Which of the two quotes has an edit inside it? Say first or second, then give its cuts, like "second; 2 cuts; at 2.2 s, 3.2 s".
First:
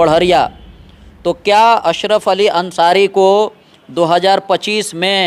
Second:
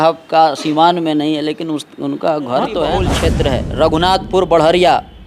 second; 1 cut; at 3.1 s